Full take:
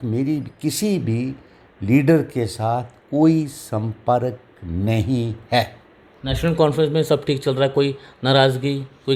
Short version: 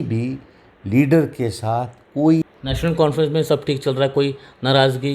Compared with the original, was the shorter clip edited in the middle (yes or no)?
yes